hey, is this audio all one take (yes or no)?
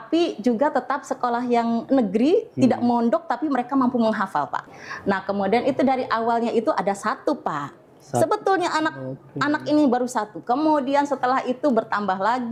no